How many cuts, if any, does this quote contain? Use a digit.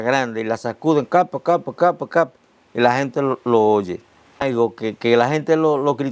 1